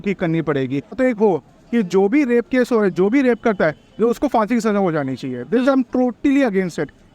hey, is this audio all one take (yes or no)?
no